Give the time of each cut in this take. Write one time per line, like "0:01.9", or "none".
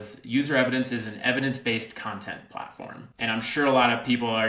0:03.0